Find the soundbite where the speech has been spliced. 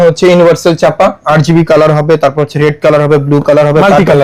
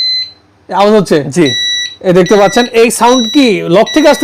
first; 1 cut; at 1.2 s

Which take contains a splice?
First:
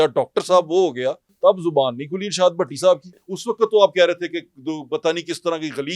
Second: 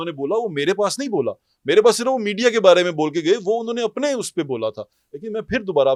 first; 2 cuts; at 1.3 s, 3.3 s

